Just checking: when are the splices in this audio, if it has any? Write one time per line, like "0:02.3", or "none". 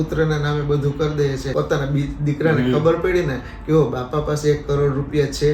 0:01.5